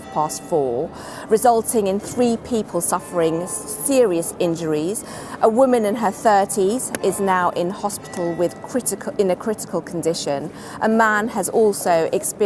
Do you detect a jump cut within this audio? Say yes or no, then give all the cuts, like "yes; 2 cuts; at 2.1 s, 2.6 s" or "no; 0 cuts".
no; 0 cuts